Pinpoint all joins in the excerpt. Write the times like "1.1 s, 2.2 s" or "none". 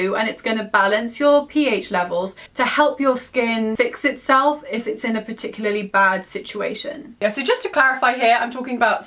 2.4 s